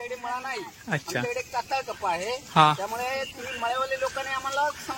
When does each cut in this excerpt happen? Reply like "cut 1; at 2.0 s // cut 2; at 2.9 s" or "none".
none